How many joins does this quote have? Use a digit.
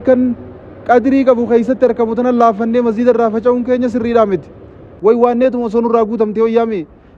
1